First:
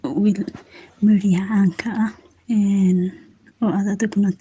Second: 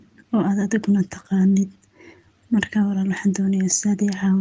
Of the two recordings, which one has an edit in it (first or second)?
first